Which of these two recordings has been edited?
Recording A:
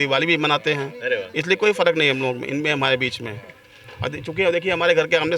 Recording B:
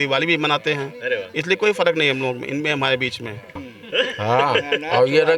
B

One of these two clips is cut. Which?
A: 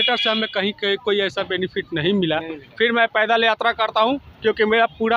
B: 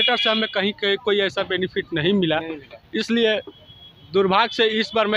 A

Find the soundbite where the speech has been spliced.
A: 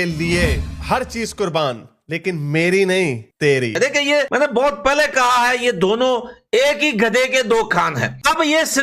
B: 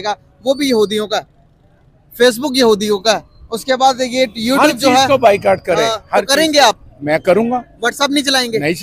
A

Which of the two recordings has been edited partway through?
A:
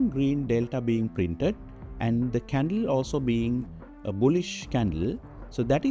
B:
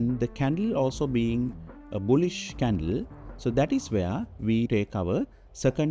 B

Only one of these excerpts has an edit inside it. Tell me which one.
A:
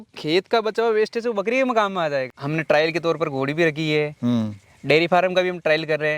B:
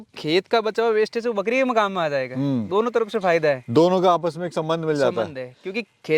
A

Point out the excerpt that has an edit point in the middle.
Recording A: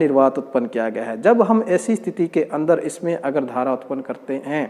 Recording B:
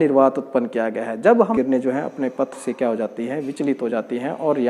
B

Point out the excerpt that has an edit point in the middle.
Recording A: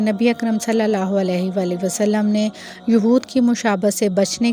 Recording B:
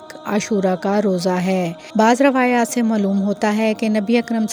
B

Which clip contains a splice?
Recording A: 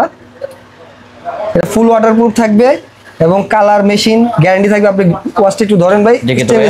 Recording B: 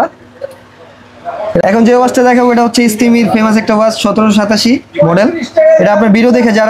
B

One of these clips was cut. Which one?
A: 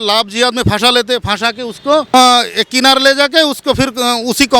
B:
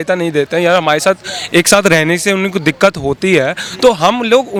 A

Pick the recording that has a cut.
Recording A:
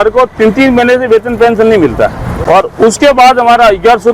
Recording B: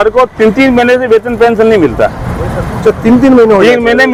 A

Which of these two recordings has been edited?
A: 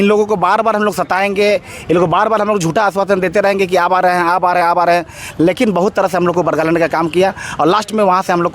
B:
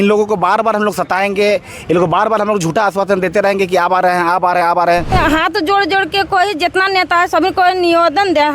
B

